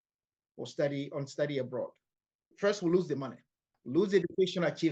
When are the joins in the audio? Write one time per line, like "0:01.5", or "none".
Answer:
0:02.5
0:03.8